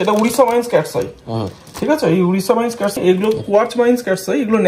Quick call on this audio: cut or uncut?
cut